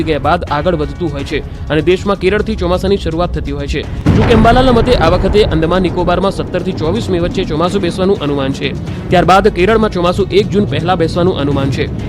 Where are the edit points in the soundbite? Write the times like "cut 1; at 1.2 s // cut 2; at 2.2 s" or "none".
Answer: cut 1; at 8.0 s